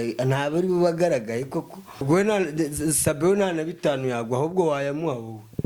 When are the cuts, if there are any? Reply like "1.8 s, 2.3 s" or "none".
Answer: 2.0 s